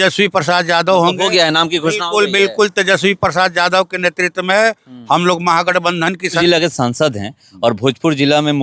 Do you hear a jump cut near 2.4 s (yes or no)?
no